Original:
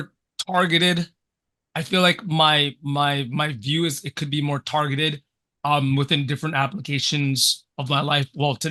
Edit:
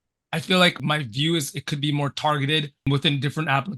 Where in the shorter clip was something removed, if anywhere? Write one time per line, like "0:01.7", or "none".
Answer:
0:00.8
0:02.9